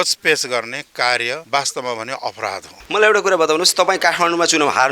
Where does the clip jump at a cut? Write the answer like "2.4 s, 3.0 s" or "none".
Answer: 2.7 s